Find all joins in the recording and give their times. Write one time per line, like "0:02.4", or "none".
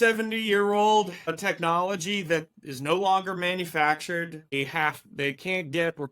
0:01.4
0:04.5